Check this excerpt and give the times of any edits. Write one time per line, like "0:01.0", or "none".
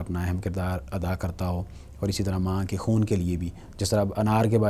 none